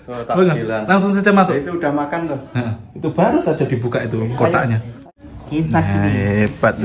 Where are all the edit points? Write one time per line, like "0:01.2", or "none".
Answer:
0:05.0